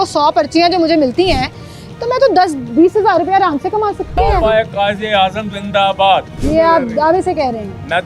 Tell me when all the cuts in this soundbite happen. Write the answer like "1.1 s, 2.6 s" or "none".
4.2 s, 6.3 s